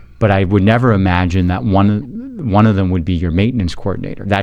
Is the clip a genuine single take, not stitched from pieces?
yes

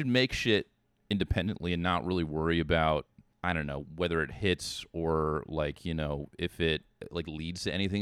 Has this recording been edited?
yes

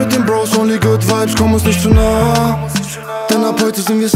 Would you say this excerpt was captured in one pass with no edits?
yes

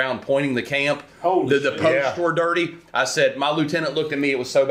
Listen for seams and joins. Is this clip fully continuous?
yes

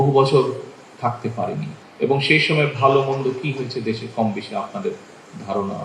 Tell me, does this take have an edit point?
yes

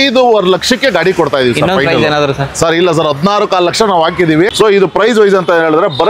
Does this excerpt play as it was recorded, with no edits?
no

